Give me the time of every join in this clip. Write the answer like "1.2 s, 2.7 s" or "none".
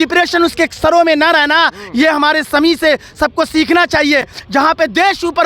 none